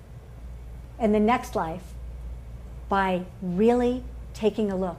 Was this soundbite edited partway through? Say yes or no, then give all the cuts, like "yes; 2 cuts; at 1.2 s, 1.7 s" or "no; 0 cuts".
yes; 1 cut; at 3.4 s